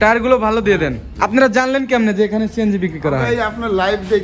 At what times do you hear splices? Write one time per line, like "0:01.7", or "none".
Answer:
0:01.1